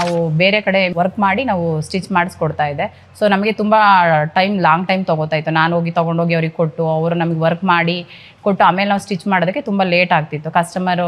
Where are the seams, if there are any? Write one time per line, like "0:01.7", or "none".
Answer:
0:00.9